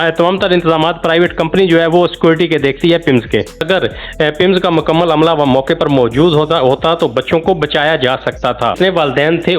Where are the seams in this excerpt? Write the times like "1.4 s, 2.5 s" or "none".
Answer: 3.6 s, 8.8 s